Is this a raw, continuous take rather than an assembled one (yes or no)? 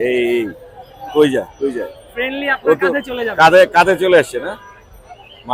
yes